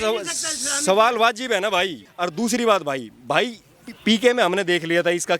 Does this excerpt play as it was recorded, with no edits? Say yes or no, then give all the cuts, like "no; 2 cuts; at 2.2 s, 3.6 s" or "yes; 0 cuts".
no; 1 cut; at 2.1 s